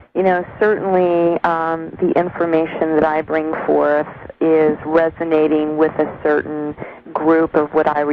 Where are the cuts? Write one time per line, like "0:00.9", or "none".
0:05.2